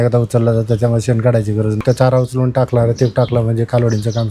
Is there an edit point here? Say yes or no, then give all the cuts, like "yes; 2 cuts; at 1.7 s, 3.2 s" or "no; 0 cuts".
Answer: yes; 1 cut; at 1.8 s